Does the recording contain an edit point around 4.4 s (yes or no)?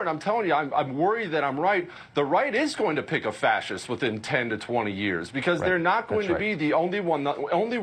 yes